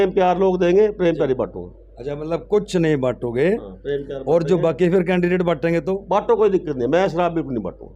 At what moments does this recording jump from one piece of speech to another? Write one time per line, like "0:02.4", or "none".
none